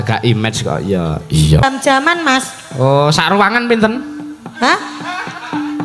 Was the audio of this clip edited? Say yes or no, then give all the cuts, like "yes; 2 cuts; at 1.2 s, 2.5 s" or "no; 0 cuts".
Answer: yes; 1 cut; at 1.6 s